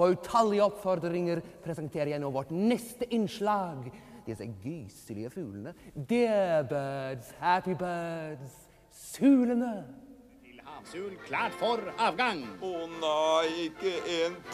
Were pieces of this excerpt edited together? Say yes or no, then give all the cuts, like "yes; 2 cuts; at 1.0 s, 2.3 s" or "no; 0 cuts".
yes; 1 cut; at 3.1 s